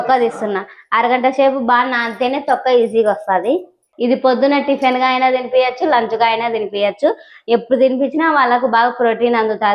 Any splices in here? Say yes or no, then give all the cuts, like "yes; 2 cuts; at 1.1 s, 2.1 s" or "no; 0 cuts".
yes; 1 cut; at 3.9 s